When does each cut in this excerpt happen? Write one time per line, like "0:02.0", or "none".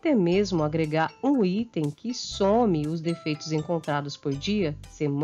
none